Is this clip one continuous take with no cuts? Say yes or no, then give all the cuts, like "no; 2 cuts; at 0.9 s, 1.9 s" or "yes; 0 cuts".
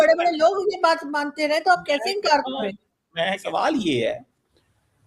no; 1 cut; at 3.4 s